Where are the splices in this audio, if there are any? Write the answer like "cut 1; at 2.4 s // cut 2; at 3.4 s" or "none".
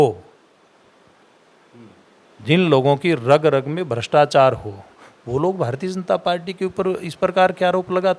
none